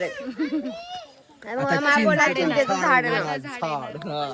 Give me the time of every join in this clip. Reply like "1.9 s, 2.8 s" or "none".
none